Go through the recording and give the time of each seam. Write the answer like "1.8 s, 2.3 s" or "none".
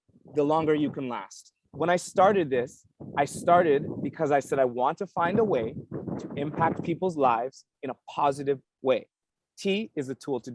1.7 s